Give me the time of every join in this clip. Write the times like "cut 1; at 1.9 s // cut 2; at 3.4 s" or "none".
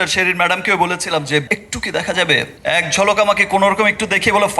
cut 1; at 1.5 s // cut 2; at 2.5 s